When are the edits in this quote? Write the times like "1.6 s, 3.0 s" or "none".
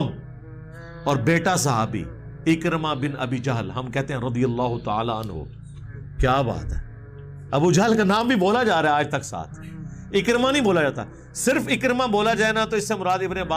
none

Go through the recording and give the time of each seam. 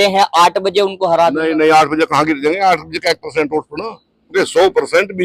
4.3 s

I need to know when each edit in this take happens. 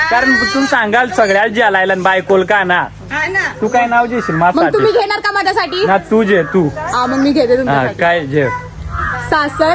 none

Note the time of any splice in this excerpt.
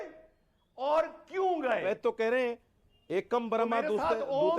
1.8 s

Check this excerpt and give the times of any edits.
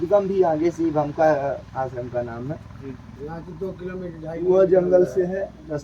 none

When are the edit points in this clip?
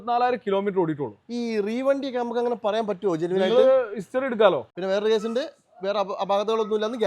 4.7 s

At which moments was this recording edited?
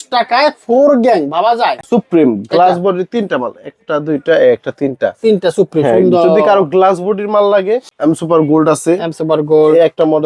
1.8 s, 7.9 s

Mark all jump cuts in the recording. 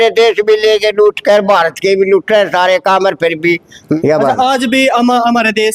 4.0 s

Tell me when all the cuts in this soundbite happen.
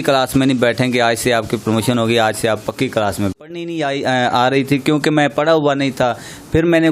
3.3 s

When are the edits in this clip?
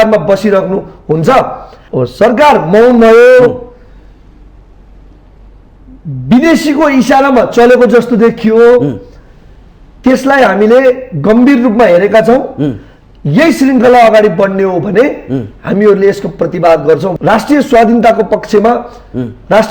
1.8 s, 17.2 s

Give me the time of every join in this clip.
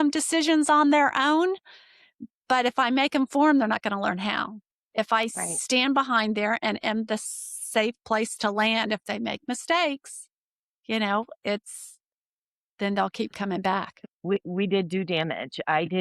14.1 s

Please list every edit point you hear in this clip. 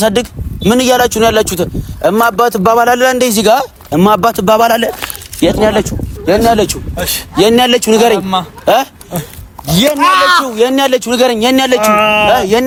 none

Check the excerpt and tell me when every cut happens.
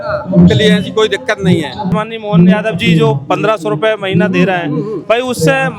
1.9 s

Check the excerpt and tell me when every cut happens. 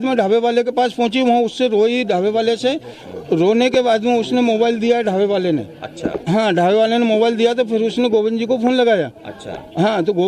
1.1 s

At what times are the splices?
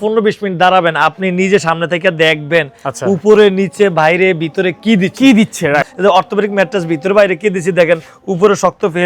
5.9 s

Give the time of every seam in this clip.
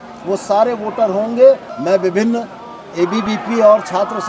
1.7 s

